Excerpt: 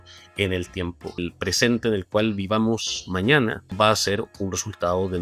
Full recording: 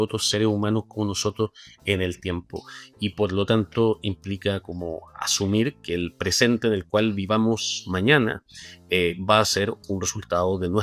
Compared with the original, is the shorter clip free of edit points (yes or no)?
no